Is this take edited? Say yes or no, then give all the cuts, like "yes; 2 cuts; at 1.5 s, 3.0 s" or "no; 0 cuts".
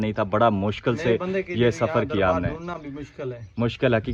no; 0 cuts